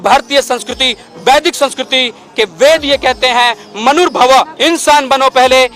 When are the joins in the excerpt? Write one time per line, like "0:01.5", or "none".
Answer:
0:04.5